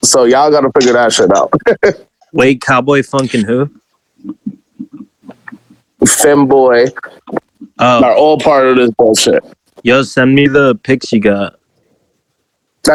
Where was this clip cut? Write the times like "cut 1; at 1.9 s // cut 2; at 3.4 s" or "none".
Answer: none